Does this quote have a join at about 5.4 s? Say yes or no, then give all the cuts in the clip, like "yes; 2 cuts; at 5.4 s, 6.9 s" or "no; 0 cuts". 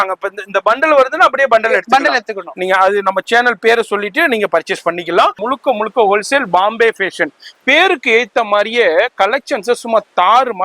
yes; 1 cut; at 5.4 s